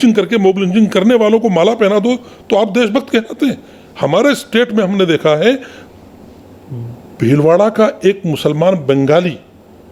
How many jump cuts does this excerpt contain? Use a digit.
0